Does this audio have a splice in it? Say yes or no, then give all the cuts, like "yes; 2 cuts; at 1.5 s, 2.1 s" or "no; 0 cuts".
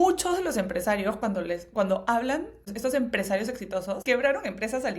yes; 2 cuts; at 2.7 s, 4.0 s